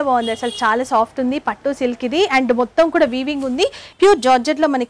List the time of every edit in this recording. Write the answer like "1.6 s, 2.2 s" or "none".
3.8 s